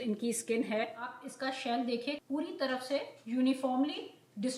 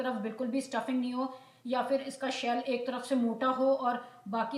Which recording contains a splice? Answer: first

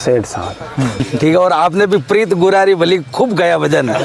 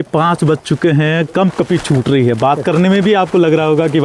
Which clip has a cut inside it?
first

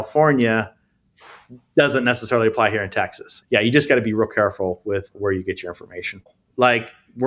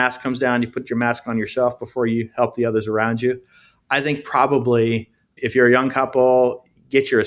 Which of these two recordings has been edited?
first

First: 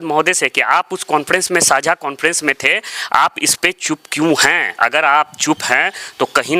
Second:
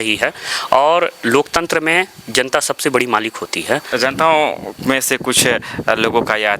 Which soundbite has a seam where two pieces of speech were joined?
second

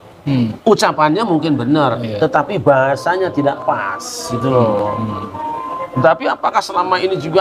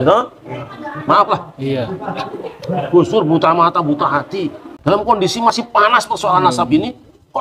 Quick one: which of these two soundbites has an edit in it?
second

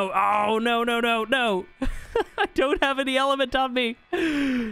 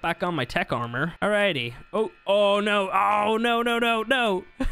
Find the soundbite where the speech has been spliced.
second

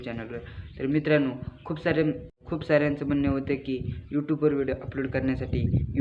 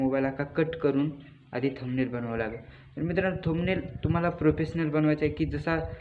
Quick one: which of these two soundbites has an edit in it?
first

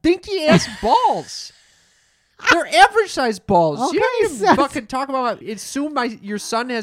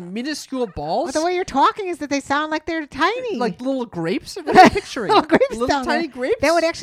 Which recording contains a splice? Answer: first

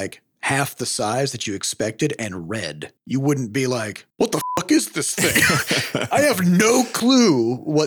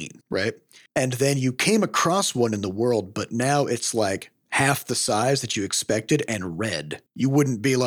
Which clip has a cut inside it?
first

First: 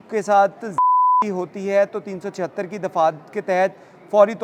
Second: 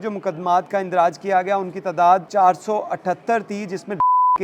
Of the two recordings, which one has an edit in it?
second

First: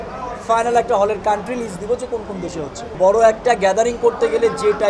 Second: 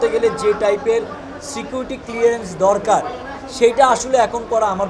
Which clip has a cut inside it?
first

